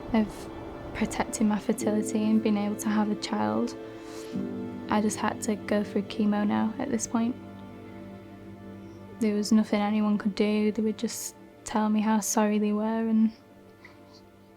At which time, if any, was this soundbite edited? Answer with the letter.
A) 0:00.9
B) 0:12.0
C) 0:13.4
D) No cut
A